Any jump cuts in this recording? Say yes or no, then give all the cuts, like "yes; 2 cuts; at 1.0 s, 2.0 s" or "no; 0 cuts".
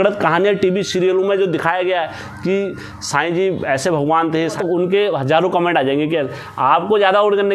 yes; 1 cut; at 4.6 s